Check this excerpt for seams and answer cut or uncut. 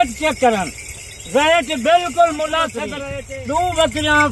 cut